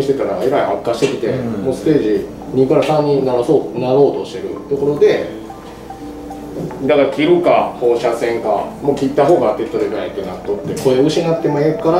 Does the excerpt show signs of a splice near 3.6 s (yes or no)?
no